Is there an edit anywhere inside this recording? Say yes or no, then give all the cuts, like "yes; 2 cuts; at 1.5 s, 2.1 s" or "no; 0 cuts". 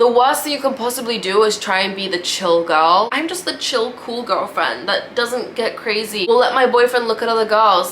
no; 0 cuts